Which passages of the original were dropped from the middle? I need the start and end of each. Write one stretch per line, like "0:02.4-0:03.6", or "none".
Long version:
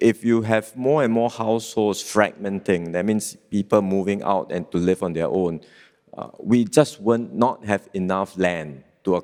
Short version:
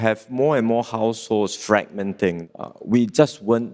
0:02.9-0:06.0